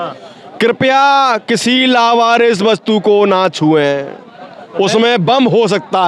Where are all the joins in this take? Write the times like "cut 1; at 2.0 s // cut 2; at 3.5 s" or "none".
none